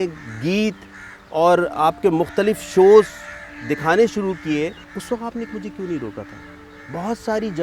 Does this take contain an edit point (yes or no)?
yes